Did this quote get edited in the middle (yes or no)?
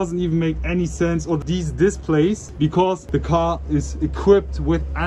no